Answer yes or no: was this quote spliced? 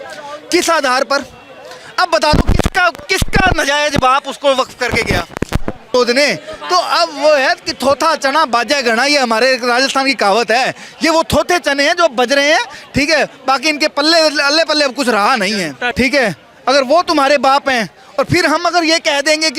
yes